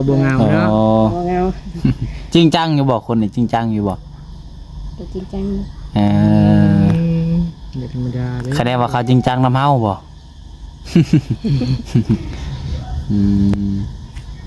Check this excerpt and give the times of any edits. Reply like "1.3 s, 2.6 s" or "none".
none